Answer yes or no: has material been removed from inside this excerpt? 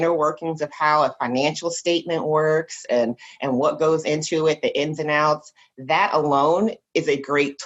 no